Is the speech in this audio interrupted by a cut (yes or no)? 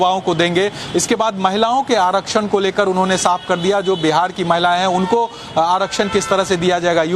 yes